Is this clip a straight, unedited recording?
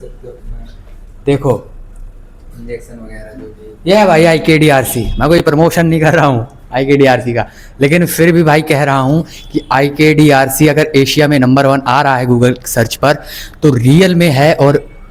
yes; 0 cuts

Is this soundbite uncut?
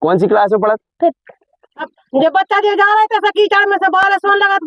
no; 1 cut; at 2.0 s

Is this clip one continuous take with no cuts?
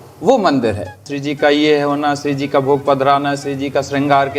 no; 1 cut; at 1.0 s

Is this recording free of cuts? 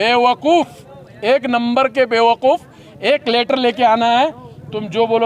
yes; 0 cuts

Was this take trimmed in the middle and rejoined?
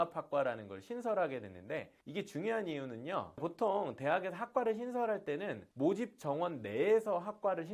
no; 0 cuts

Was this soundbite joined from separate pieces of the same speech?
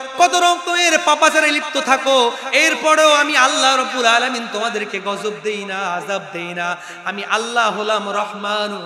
no; 0 cuts

